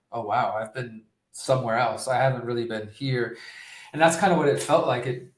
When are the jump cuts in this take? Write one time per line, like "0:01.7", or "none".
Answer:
none